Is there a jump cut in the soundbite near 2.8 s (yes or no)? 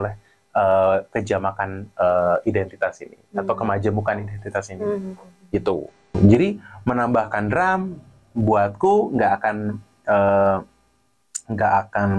no